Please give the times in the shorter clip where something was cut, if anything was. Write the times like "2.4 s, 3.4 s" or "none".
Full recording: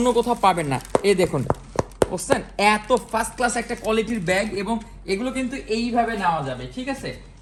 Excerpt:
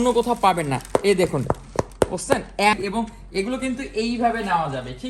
2.7 s